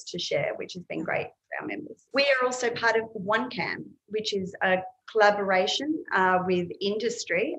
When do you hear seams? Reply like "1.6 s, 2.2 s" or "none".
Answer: 2.0 s